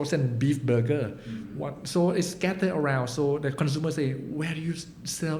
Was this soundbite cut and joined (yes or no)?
no